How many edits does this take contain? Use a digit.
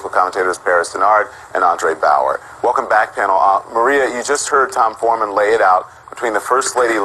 1